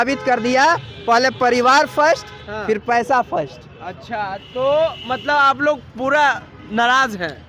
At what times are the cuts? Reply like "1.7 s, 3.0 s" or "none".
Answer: none